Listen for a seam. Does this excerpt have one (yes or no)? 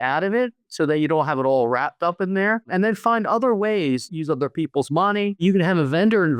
yes